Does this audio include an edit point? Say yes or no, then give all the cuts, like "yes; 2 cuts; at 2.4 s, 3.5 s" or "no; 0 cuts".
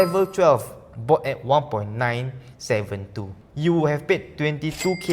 yes; 1 cut; at 3.4 s